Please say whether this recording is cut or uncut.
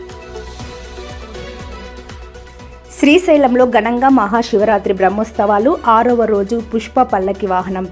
cut